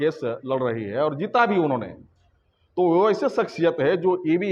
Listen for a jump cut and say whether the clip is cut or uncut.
uncut